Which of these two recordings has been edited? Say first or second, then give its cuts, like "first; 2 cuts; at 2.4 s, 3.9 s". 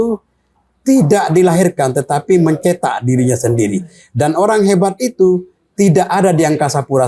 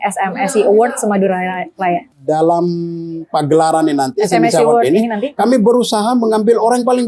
second; 1 cut; at 2.1 s